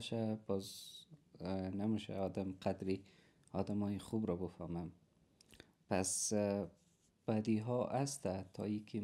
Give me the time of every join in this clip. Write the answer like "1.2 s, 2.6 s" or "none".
none